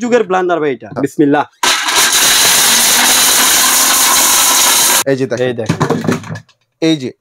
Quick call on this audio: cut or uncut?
cut